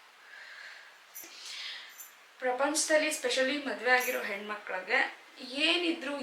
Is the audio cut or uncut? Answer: cut